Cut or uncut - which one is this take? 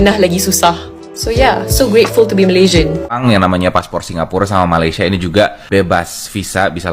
cut